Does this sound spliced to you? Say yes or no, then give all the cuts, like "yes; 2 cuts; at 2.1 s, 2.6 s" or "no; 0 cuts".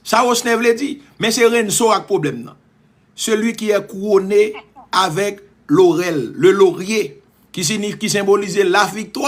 no; 0 cuts